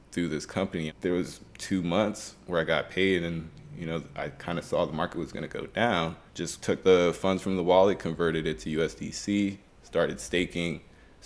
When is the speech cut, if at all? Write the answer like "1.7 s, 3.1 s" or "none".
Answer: 0.9 s, 6.7 s